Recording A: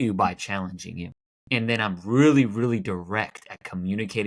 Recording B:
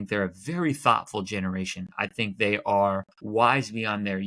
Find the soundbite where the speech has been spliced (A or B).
B